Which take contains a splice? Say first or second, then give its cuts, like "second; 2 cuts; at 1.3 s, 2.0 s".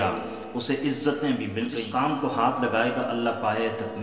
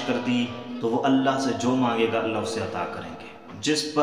first; 1 cut; at 1.7 s